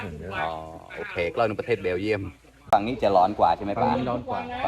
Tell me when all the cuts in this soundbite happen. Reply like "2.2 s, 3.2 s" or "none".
2.7 s